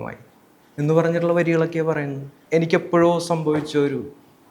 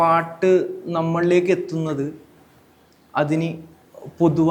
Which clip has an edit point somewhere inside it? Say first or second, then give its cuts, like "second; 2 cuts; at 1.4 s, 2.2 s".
first; 1 cut; at 2.3 s